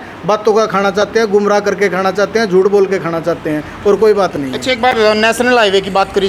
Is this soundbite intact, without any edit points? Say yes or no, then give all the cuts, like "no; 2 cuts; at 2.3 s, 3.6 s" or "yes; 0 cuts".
yes; 0 cuts